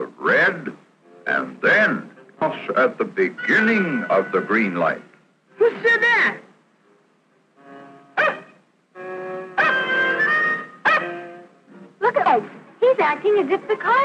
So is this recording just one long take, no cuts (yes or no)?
yes